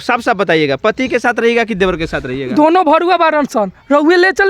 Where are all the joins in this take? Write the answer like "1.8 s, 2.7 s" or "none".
none